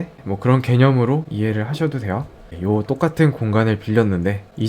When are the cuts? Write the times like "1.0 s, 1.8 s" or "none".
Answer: 2.5 s